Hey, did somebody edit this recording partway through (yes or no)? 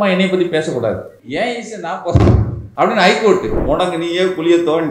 yes